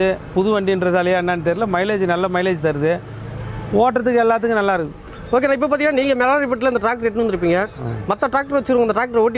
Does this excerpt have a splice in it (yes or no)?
no